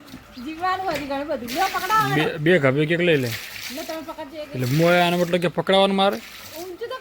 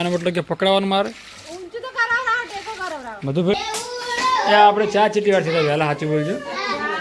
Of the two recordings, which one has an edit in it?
second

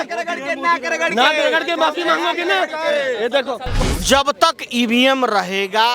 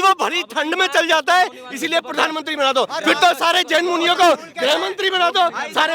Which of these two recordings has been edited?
first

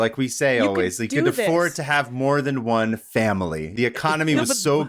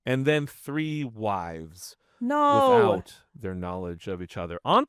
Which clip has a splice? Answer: first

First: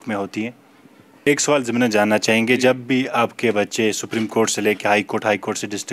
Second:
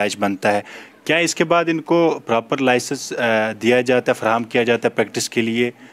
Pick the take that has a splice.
first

